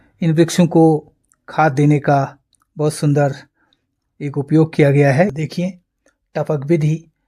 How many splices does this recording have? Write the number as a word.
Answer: one